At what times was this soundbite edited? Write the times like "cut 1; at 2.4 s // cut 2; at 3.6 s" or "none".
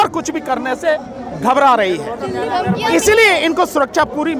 none